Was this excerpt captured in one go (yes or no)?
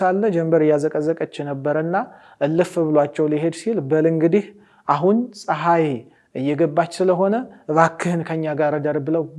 yes